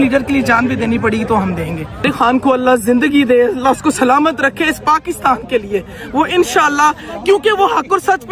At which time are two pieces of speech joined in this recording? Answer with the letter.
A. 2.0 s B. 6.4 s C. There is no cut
A